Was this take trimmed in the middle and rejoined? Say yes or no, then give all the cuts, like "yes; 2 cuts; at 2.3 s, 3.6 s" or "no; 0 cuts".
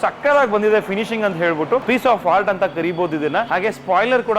yes; 2 cuts; at 1.8 s, 3.5 s